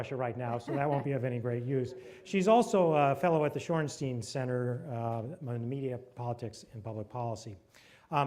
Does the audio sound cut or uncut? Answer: cut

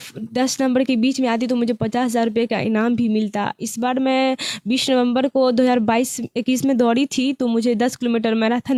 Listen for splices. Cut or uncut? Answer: uncut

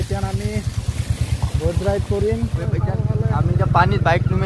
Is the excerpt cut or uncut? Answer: cut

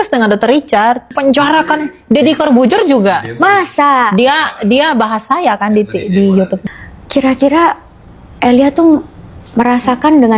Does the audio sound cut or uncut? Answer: cut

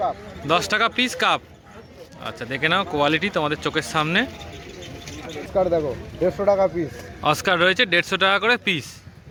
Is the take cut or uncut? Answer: uncut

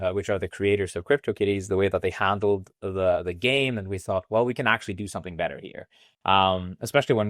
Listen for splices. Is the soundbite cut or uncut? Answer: uncut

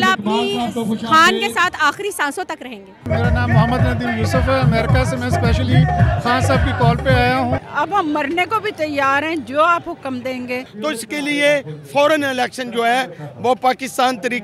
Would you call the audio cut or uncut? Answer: cut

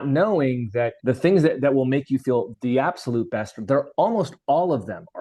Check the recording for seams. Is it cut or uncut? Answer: cut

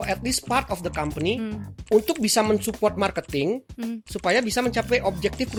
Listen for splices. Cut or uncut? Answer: uncut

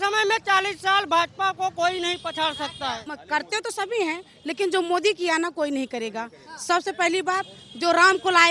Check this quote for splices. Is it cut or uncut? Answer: cut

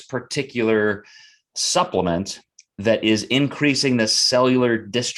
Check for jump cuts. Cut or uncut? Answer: uncut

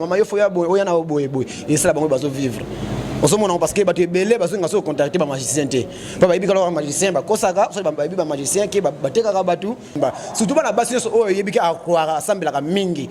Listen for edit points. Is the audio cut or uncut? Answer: cut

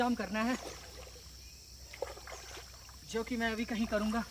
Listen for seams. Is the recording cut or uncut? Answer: uncut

